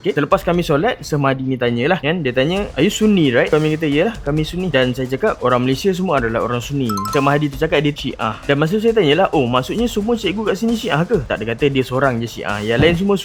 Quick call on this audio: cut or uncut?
uncut